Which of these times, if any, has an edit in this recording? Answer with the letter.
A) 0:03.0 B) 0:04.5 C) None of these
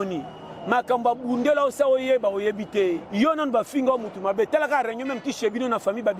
A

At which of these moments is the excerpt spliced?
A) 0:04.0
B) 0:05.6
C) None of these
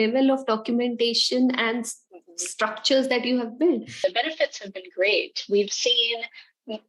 A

